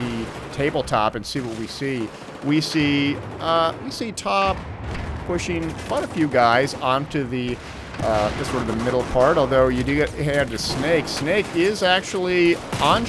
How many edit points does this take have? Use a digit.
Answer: 0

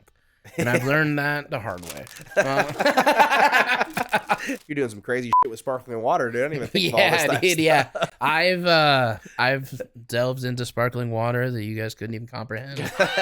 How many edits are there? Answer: 1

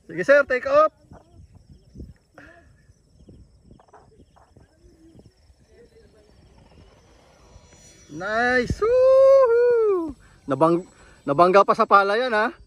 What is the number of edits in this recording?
0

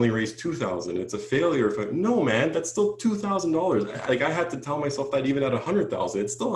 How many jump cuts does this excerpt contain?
0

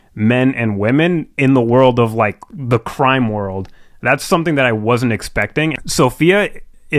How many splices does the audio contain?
1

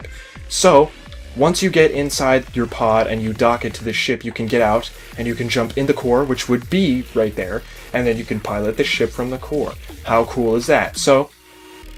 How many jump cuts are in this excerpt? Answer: 0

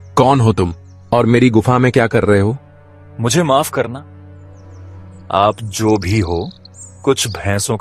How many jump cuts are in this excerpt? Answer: 0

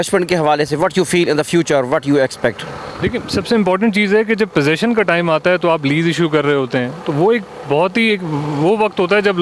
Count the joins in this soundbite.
0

